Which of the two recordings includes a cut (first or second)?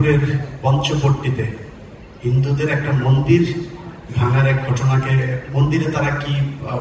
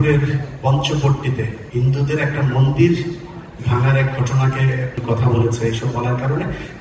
second